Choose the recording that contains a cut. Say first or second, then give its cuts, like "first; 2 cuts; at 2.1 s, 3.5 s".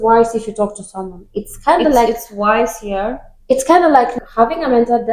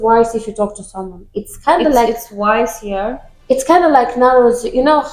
first; 1 cut; at 4.1 s